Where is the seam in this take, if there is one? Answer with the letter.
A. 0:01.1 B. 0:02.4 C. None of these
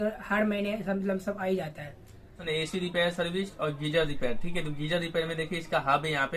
B